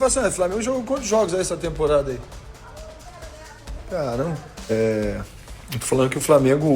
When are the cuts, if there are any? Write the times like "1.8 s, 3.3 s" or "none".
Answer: 4.7 s